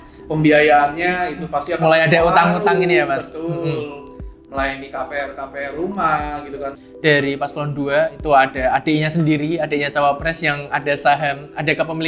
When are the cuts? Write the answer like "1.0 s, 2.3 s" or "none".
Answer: 6.8 s